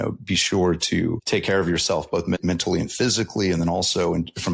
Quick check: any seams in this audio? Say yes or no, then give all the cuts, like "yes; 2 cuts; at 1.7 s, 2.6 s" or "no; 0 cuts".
yes; 2 cuts; at 1.2 s, 2.4 s